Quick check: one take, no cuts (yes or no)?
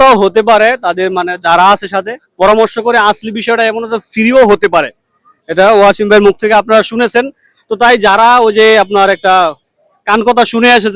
yes